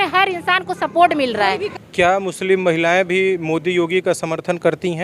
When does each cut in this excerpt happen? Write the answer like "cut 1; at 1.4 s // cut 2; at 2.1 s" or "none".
cut 1; at 1.8 s